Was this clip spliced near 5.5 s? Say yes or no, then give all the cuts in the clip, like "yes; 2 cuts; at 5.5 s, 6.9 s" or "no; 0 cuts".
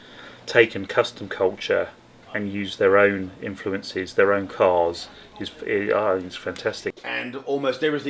no; 1 cut; at 6.9 s